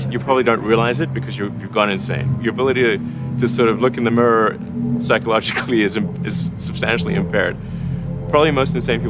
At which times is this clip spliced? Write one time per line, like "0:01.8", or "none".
none